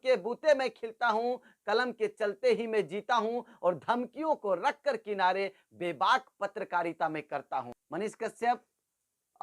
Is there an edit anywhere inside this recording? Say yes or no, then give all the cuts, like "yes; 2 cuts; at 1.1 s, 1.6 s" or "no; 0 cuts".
yes; 1 cut; at 7.8 s